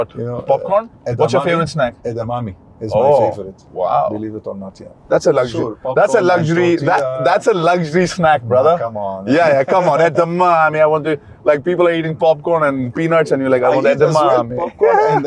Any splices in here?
no; 0 cuts

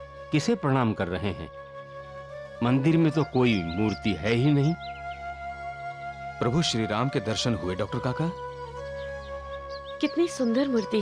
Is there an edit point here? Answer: no; 0 cuts

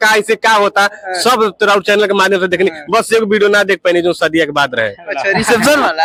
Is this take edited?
no; 0 cuts

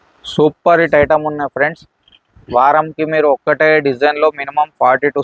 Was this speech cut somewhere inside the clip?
no; 0 cuts

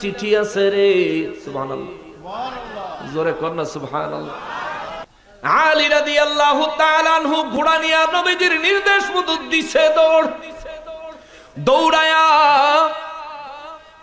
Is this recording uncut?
no; 1 cut; at 5.0 s

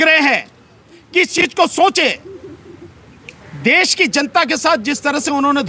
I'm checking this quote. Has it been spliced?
no; 0 cuts

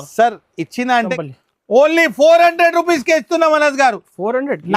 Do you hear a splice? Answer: yes; 1 cut; at 1.2 s

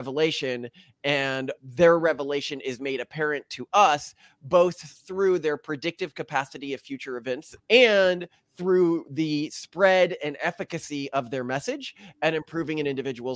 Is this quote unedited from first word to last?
no; 1 cut; at 7.5 s

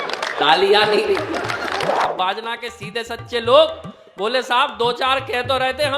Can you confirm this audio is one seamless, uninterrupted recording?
no; 1 cut; at 2.1 s

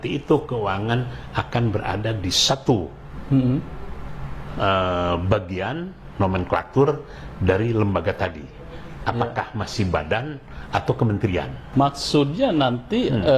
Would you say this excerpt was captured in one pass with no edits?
no; 1 cut; at 11.6 s

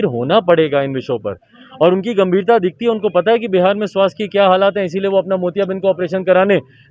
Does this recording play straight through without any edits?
yes; 0 cuts

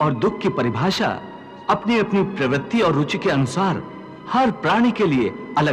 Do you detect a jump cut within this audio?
no; 0 cuts

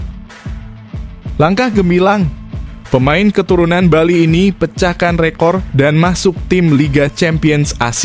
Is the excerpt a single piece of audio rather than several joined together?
yes; 0 cuts

